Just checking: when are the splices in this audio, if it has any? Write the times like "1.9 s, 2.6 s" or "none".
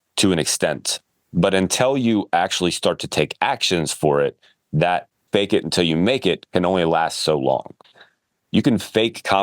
5.2 s